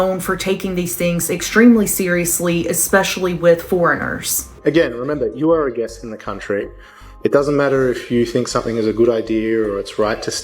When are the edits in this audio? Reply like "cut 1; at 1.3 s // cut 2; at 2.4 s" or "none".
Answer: cut 1; at 4.5 s